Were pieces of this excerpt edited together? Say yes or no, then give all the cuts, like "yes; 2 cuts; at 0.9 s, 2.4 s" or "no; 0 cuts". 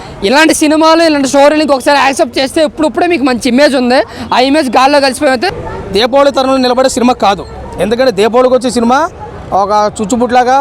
yes; 1 cut; at 5.6 s